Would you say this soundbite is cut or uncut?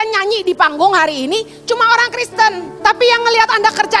cut